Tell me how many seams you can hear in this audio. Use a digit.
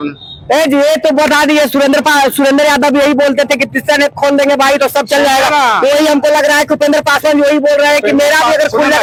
0